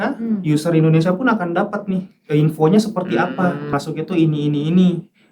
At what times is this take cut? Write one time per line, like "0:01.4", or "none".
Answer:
0:03.7

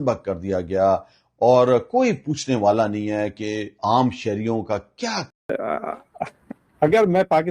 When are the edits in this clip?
0:05.4

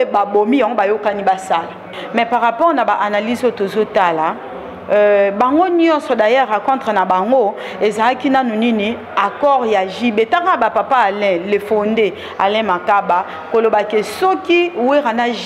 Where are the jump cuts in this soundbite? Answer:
0:02.0

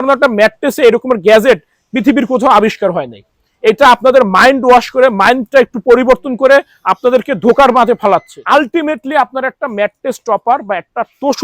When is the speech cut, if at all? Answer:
0:08.3

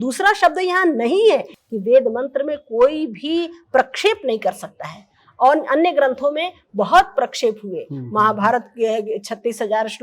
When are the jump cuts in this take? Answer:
0:01.6

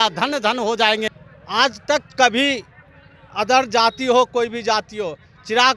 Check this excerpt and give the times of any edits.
0:01.2

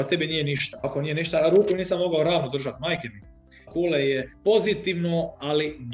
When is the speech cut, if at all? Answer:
0:00.8
0:03.6
0:04.3

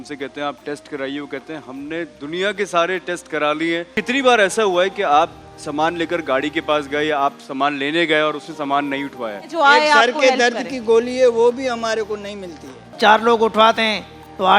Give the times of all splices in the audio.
0:03.9
0:09.5
0:12.9

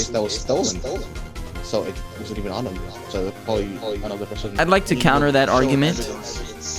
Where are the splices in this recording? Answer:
0:04.5

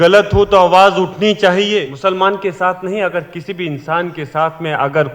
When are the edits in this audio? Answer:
0:01.9

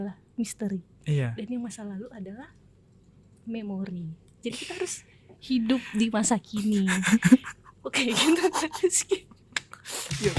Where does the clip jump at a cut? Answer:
none

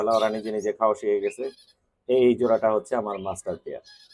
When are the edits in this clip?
none

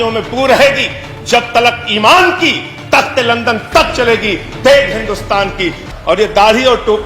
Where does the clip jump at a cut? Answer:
0:05.8

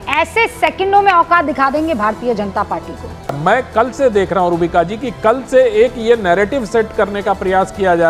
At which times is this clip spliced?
0:03.2

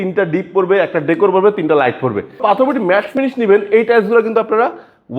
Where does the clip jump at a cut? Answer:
0:02.4

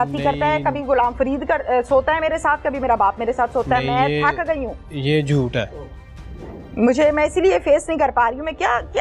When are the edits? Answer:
none

